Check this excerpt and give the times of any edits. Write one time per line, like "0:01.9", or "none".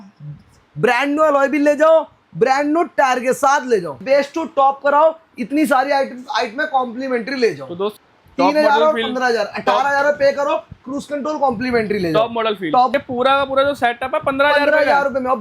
0:04.0
0:07.9
0:12.9